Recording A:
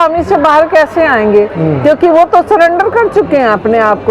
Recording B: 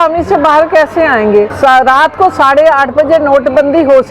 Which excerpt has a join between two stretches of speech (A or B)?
B